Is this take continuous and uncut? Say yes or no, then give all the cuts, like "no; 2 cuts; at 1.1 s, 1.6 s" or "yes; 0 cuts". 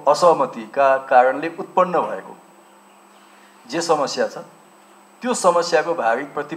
yes; 0 cuts